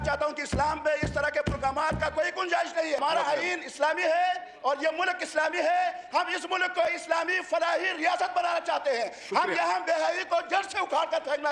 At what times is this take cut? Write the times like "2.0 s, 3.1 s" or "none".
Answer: none